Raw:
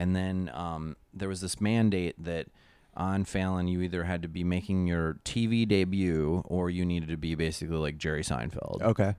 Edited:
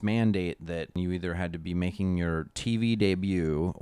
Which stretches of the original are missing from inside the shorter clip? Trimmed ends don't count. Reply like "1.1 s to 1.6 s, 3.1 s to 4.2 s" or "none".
2.5 s to 3.6 s